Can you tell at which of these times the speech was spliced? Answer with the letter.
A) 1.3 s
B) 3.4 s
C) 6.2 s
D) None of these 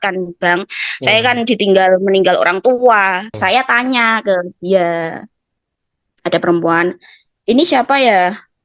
B